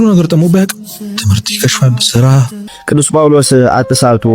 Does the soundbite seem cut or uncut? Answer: cut